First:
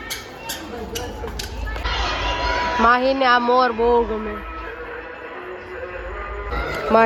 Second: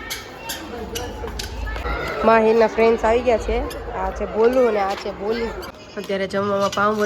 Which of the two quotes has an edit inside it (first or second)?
second